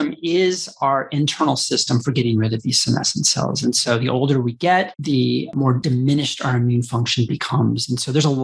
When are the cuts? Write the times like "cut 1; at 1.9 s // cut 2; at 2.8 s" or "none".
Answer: none